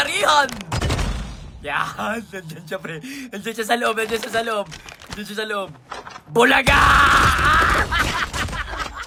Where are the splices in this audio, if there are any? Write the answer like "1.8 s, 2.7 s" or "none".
none